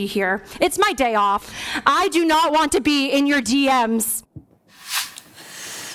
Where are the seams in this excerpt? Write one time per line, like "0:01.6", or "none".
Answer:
0:01.4

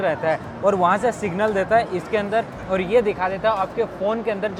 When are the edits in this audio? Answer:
none

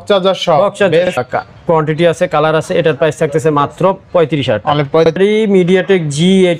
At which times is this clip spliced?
0:01.2
0:05.2

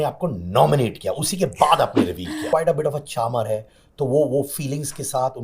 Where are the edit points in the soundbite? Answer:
0:02.4

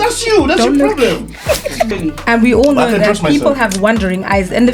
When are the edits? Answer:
0:01.9

